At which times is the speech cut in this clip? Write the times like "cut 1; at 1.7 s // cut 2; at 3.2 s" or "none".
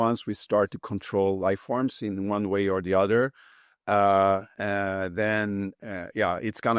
none